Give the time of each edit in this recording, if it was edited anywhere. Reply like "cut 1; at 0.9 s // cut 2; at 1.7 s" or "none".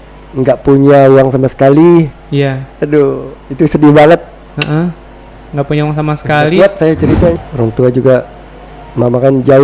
cut 1; at 7.5 s